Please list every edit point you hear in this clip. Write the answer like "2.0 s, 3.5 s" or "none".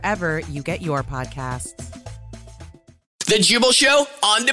3.2 s